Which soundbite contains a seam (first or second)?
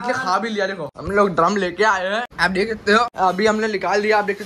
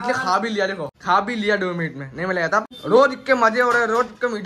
first